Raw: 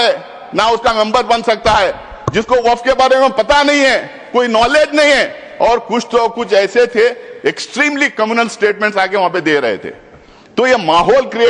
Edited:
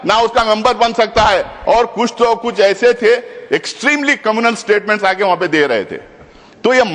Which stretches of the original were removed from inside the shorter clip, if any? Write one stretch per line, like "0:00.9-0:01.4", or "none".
0:02.0-0:05.5